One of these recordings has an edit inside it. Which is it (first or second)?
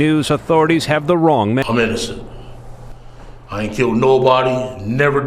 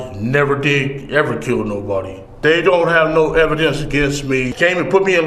first